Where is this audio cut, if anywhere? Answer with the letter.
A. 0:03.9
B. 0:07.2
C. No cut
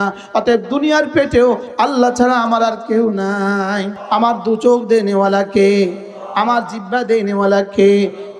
A